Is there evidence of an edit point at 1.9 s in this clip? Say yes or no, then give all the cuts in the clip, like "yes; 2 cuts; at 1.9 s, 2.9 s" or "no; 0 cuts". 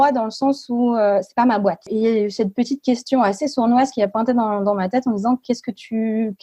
yes; 1 cut; at 1.9 s